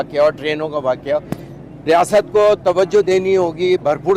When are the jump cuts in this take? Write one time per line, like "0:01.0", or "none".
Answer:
none